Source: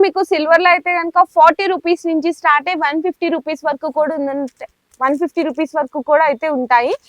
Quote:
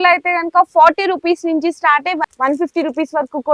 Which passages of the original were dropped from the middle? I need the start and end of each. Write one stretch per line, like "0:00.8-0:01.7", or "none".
0:02.9-0:04.9